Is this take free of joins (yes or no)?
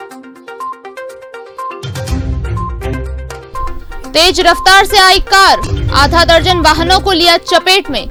yes